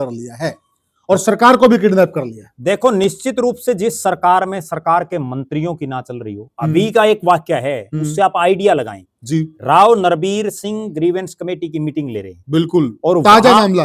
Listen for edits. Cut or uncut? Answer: uncut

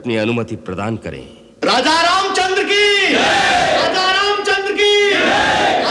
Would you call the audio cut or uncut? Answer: cut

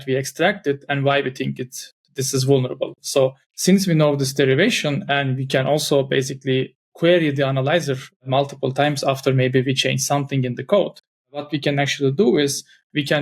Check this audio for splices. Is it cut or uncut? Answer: cut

